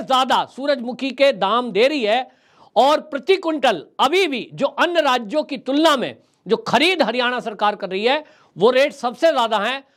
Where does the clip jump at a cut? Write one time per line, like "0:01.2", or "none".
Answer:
none